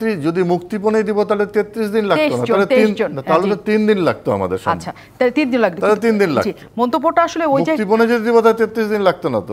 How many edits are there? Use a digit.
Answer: 0